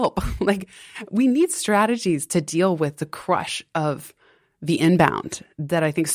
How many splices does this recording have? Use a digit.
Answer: 0